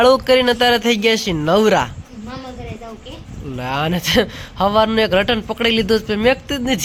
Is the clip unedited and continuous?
yes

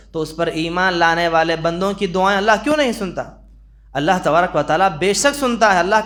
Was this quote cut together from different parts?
no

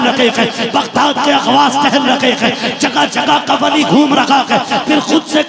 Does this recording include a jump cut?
no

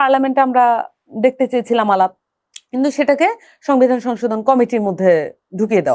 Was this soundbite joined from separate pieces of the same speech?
no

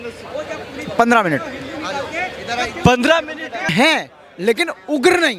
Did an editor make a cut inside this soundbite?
yes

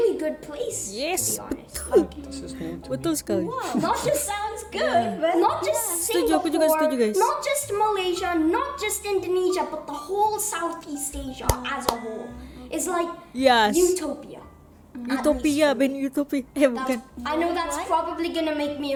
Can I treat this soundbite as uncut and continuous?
yes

